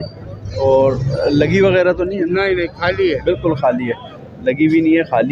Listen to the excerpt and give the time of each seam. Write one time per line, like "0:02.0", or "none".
none